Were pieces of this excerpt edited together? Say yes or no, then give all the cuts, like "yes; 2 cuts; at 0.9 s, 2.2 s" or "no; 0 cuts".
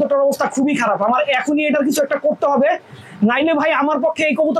no; 0 cuts